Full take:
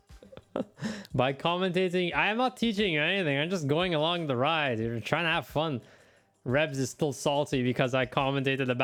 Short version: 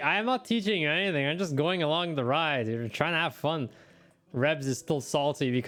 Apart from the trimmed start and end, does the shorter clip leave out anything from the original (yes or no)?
no